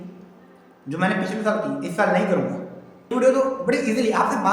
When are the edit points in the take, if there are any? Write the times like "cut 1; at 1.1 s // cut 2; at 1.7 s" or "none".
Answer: cut 1; at 3.1 s

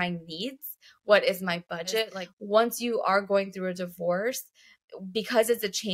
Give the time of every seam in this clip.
cut 1; at 2.2 s

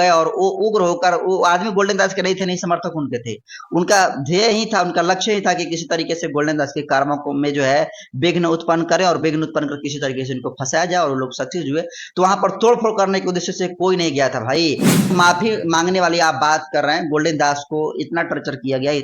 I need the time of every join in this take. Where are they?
cut 1; at 15.1 s

